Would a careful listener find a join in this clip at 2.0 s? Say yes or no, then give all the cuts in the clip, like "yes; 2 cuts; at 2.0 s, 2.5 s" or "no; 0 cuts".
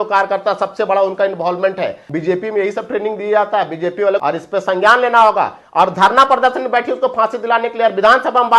yes; 2 cuts; at 2.0 s, 4.2 s